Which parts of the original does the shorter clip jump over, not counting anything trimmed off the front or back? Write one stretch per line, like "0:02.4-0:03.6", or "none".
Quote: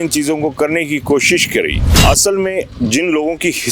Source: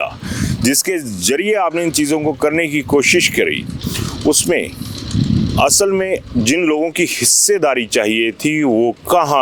0:03.8-0:05.5